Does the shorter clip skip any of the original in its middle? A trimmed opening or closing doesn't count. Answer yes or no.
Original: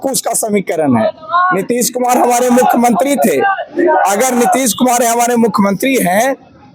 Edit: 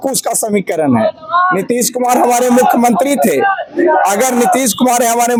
no